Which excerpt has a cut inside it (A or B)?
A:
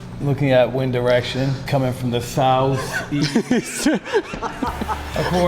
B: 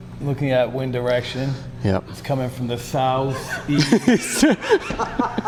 A